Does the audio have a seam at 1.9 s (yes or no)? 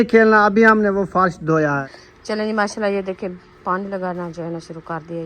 yes